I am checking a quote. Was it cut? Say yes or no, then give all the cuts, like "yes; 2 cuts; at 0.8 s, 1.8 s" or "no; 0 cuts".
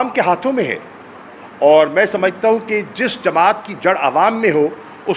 no; 0 cuts